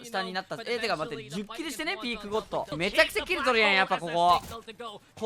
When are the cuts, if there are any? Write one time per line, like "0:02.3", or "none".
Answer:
0:02.7